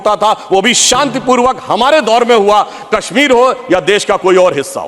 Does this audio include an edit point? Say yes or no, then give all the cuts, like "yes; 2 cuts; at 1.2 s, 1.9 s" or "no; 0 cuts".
no; 0 cuts